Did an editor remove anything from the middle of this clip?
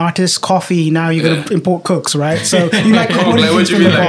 no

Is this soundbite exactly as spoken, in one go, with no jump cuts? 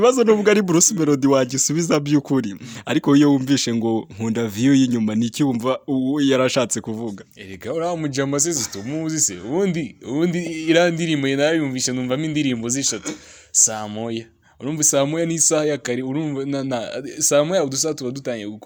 yes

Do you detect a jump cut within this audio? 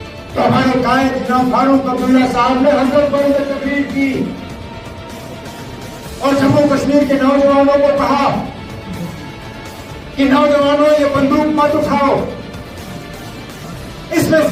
no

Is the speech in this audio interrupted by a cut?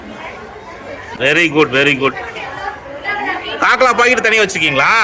yes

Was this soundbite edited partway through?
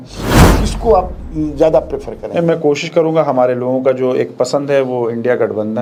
no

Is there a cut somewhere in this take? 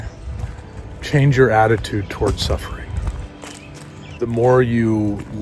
yes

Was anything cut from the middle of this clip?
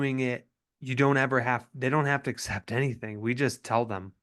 no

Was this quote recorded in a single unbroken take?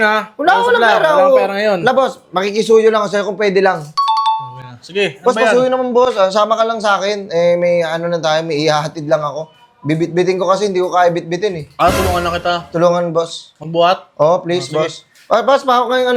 yes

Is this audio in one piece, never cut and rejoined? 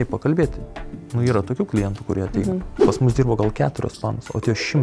no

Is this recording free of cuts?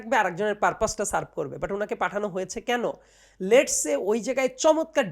yes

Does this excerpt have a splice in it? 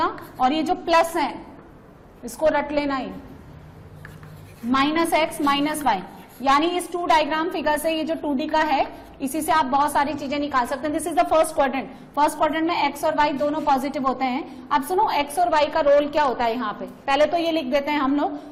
no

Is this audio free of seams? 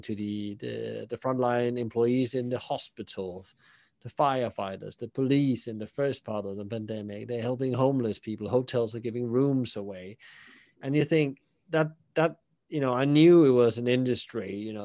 yes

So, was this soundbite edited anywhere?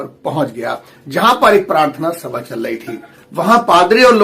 yes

